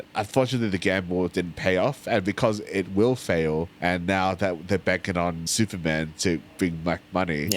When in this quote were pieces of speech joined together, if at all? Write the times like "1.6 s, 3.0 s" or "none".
3.7 s, 5.4 s